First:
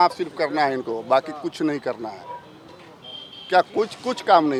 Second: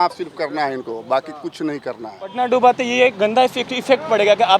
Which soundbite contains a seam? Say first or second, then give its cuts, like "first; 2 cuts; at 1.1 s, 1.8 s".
second; 1 cut; at 2.3 s